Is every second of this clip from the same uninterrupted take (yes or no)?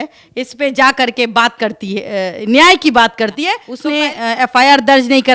no